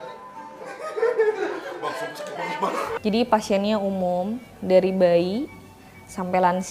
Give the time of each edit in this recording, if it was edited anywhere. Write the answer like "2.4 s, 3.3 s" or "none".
3.0 s